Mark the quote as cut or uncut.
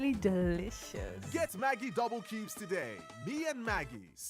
uncut